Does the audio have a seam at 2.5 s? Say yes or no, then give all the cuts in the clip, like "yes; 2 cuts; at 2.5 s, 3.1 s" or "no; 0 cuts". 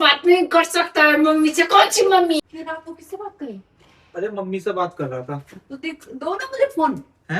yes; 1 cut; at 2.5 s